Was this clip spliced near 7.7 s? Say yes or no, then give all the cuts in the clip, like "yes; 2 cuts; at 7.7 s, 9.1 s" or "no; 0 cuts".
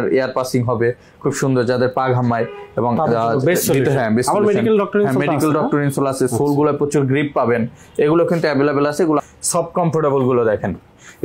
no; 1 cut; at 9.2 s